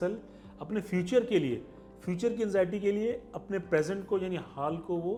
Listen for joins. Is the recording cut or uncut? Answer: uncut